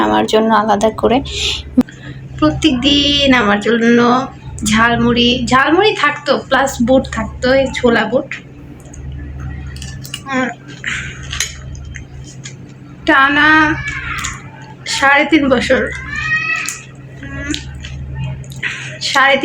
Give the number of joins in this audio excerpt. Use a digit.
1